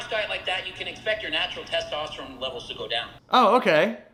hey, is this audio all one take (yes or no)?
yes